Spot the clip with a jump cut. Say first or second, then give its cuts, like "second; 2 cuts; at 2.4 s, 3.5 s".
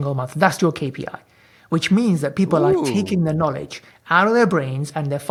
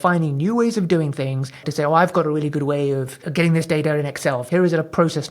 second; 3 cuts; at 1.6 s, 3.2 s, 4.4 s